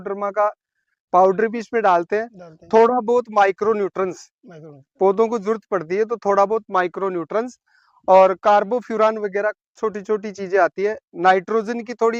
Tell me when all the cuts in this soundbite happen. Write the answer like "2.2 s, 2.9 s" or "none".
none